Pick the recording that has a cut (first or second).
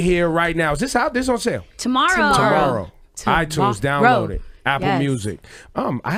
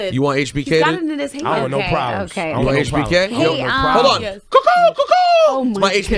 second